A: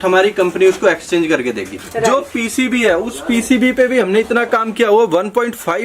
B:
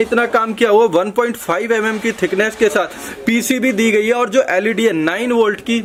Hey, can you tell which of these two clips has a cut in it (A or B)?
A